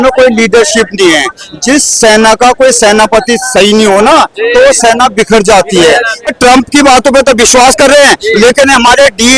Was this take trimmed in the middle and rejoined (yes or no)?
yes